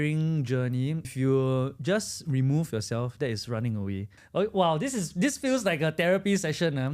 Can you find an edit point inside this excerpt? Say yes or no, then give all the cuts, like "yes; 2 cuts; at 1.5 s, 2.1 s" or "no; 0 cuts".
yes; 2 cuts; at 1.1 s, 4.1 s